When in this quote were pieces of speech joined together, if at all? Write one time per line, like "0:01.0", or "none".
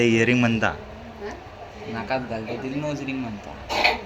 none

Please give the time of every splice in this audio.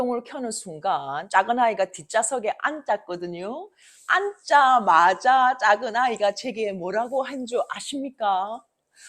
0:01.2

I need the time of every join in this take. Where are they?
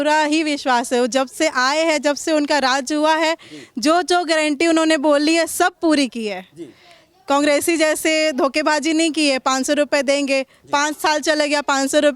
none

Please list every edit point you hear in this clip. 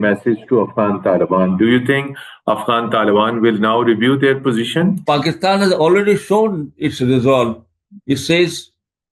0:05.0

